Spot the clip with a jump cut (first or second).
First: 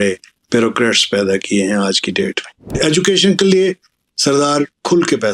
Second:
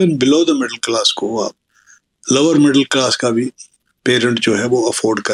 first